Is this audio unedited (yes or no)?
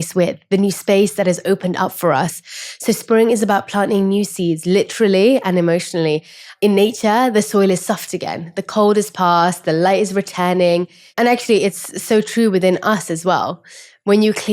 no